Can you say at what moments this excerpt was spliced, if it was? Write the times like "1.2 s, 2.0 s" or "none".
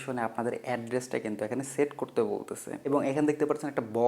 2.8 s